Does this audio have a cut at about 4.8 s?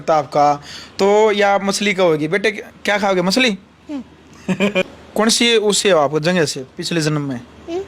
yes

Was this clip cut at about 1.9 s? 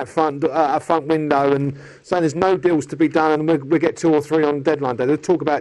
no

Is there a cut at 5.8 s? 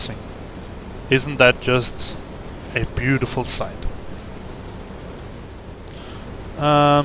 yes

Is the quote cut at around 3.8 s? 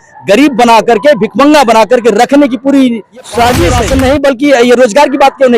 yes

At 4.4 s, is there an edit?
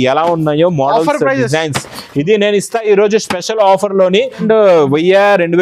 yes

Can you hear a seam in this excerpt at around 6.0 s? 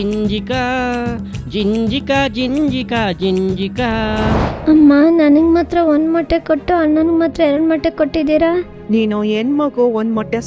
no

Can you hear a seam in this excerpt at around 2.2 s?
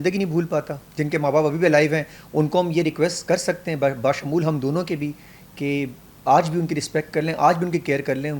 no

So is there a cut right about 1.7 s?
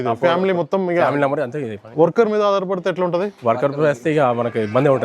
no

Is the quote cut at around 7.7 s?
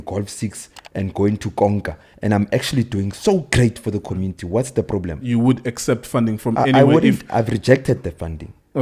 no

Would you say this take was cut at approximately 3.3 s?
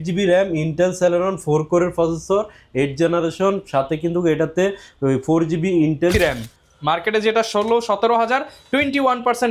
no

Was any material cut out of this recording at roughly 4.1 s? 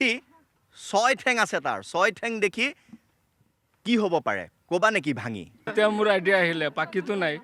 no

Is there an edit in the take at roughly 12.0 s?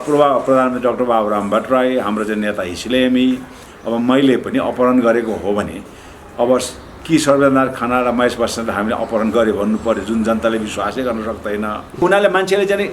yes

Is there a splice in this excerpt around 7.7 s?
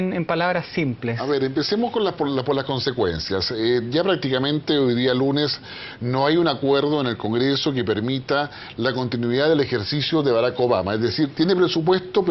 yes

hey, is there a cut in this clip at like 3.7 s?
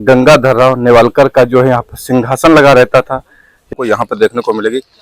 yes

